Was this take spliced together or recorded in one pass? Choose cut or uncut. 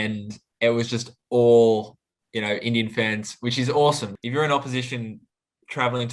cut